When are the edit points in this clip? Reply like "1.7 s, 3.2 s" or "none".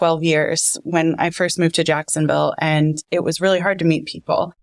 none